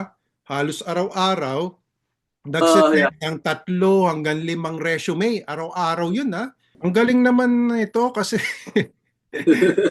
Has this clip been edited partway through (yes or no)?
yes